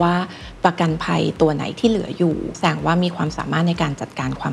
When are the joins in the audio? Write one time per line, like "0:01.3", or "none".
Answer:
0:02.5